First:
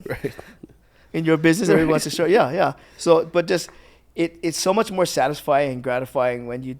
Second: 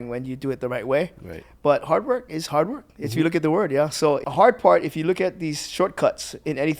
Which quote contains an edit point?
second; 1 cut; at 4.3 s

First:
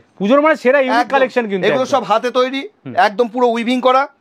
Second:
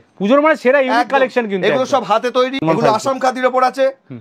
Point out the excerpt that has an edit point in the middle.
second; 1 cut; at 2.6 s

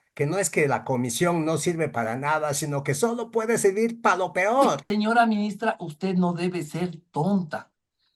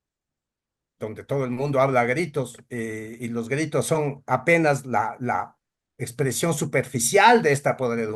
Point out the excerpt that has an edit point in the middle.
first; 1 cut; at 4.8 s

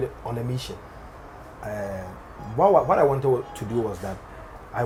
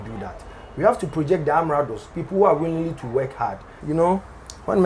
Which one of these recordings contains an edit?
second; 1 cut; at 3.8 s

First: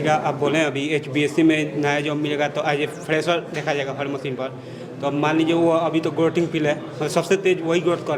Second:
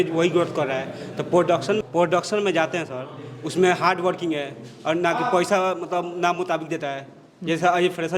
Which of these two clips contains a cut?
second; 1 cut; at 1.8 s

